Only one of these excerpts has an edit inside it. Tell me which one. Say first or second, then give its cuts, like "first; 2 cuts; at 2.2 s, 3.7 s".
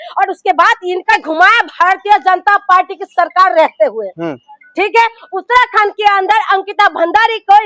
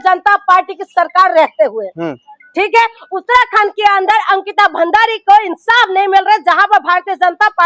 first; 1 cut; at 1.1 s